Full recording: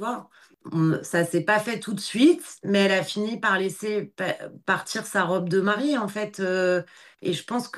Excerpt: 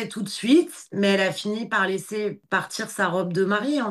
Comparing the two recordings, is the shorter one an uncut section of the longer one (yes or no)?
no